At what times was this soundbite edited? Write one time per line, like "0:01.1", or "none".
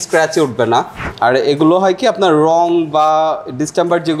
0:01.0